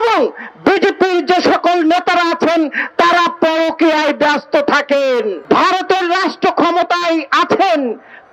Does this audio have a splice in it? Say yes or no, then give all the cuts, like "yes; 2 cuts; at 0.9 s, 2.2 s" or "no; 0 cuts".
yes; 1 cut; at 5.4 s